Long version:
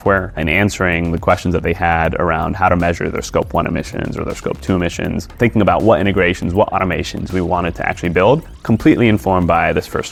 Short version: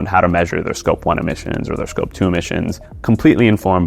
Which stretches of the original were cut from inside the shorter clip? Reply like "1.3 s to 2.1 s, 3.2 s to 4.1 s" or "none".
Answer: 5.3 s to 8.4 s